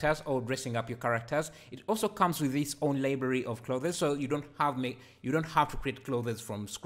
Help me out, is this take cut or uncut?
uncut